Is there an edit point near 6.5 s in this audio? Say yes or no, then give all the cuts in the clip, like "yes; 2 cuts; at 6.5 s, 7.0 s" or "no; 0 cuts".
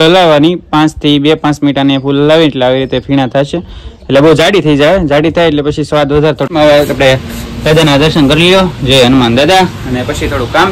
yes; 1 cut; at 6.5 s